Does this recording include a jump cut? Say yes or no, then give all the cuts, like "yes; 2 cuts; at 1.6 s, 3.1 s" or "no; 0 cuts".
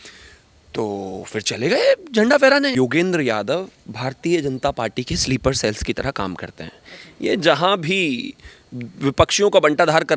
yes; 1 cut; at 2.7 s